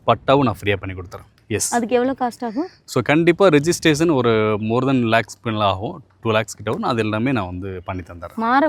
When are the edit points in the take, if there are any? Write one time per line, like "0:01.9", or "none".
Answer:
none